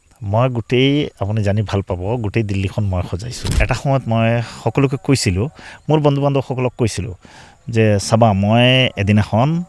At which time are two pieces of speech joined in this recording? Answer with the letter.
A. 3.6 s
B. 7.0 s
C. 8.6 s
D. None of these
A